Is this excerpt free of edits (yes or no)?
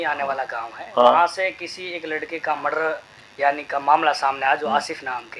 yes